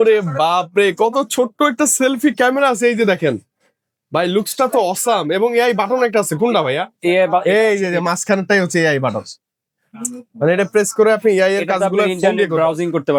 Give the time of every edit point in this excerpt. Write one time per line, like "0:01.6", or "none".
none